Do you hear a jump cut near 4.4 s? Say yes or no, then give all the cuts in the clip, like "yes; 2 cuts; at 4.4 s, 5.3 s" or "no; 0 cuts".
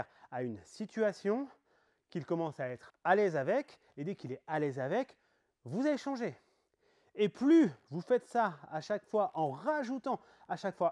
no; 1 cut; at 2.9 s